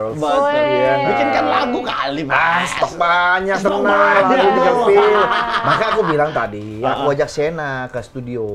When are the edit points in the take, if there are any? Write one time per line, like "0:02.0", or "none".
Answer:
none